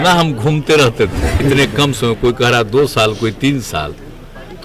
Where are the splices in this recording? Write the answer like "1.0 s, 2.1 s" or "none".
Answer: 1.4 s